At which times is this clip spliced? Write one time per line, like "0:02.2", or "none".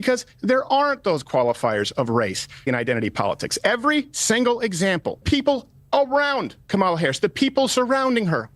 0:02.7
0:05.6